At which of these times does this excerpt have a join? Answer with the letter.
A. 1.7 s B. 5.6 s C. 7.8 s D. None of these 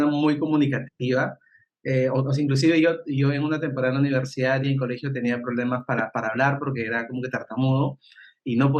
D